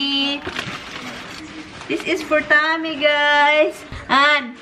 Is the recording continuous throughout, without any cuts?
yes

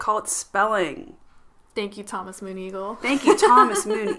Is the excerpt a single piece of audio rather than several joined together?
yes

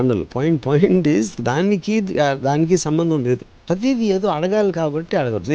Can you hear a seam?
yes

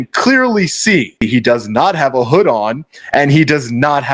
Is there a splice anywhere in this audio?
yes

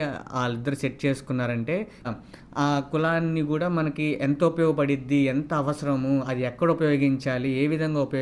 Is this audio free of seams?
no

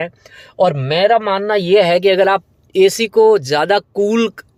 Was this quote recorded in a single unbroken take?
yes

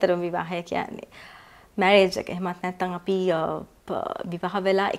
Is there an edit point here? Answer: no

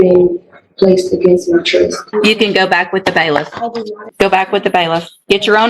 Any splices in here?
yes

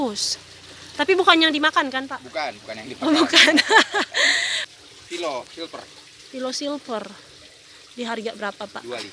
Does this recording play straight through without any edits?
no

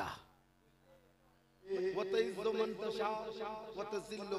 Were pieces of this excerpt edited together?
yes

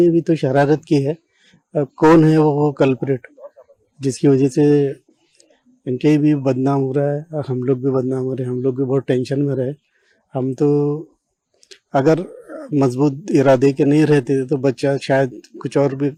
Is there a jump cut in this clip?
no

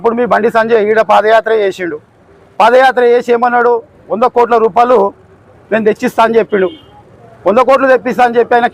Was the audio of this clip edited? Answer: no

